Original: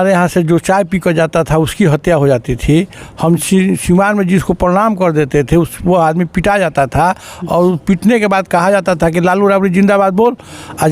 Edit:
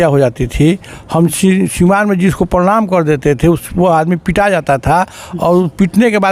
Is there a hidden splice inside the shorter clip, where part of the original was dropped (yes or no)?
no